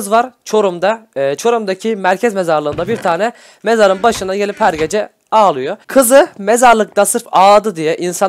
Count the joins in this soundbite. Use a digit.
1